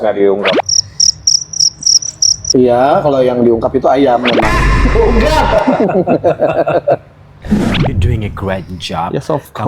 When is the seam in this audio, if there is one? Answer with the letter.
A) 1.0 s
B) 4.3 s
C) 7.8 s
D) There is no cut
C